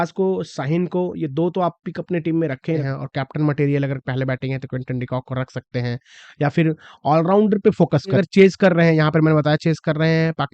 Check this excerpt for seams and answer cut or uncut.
cut